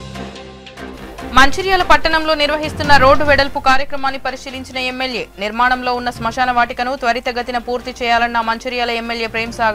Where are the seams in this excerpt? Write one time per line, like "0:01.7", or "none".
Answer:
none

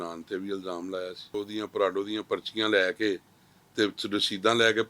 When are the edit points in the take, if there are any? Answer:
0:01.4

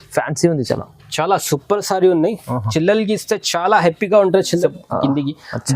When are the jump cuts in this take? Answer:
0:04.6

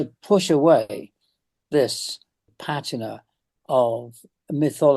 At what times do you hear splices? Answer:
0:02.5

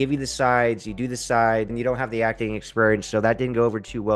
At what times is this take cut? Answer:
0:01.7

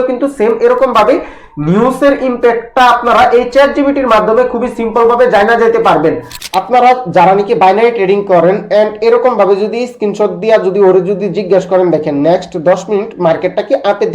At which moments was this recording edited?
0:06.3

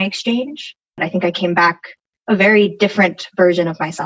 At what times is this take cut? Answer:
0:01.0

